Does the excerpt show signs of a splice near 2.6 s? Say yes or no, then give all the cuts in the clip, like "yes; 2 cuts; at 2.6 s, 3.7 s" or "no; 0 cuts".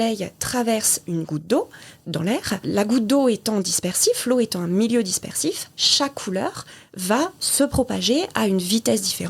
yes; 1 cut; at 2.6 s